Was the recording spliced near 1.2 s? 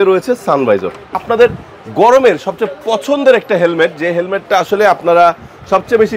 yes; 1 cut; at 1.2 s

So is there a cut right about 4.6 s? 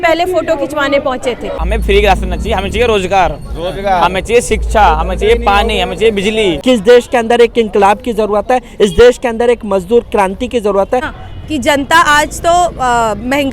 no; 3 cuts; at 1.6 s, 6.6 s, 11.1 s

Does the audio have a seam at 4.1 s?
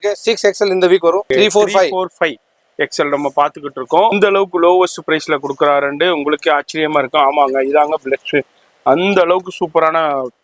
yes; 2 cuts; at 1.3 s, 4.1 s

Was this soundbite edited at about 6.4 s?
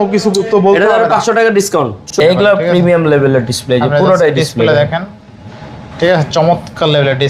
no; 1 cut; at 2.0 s

